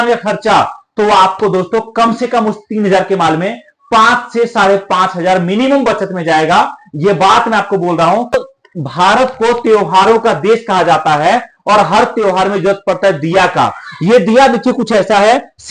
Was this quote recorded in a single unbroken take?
no; 1 cut; at 8.3 s

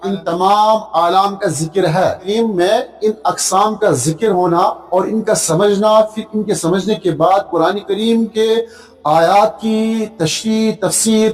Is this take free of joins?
yes; 0 cuts

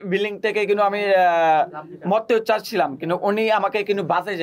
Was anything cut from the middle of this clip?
no; 0 cuts

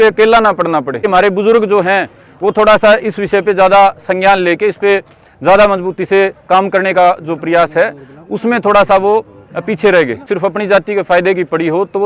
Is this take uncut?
no; 2 cuts; at 1.0 s, 10.3 s

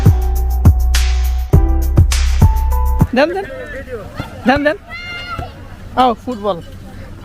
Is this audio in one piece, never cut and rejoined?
no; 3 cuts; at 0.9 s, 2.1 s, 3.1 s

